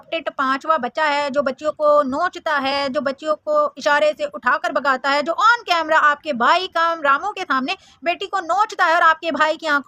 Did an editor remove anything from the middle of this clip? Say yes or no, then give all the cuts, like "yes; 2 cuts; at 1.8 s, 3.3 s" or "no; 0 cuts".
no; 0 cuts